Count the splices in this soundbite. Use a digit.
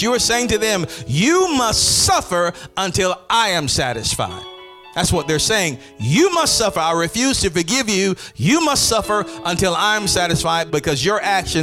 1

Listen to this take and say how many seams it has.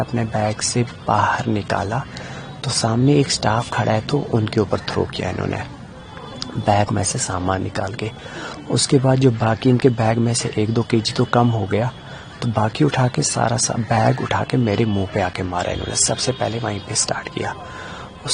0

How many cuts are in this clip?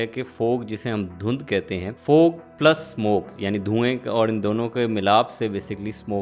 1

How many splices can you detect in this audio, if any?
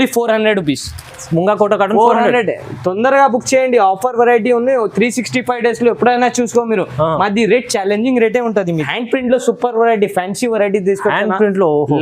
1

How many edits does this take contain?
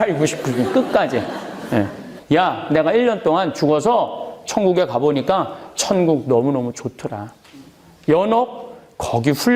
1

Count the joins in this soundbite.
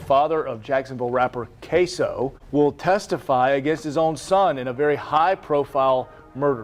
1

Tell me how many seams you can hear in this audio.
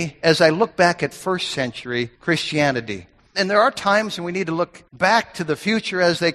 3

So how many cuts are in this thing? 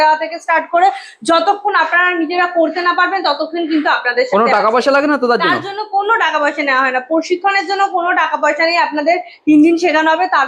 0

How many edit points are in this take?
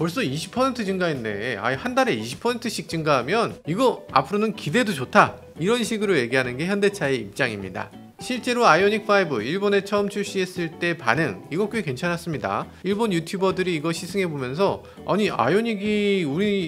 0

